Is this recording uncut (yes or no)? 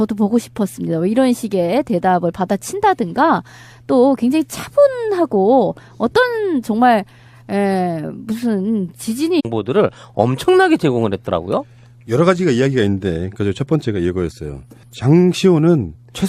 yes